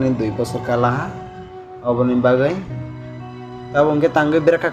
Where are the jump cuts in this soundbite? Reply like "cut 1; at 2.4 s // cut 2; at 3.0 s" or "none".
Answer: none